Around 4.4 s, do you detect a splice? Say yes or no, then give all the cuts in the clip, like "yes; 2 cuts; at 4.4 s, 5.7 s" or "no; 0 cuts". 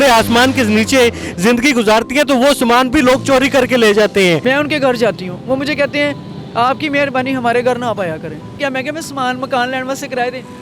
yes; 2 cuts; at 4.4 s, 8.5 s